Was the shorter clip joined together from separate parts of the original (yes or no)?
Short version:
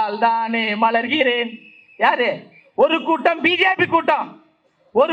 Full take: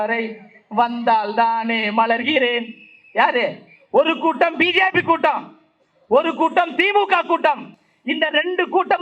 no